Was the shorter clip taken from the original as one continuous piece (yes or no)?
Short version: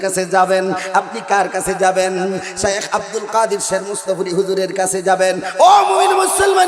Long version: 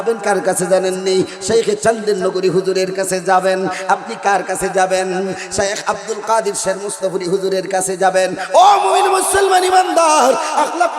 yes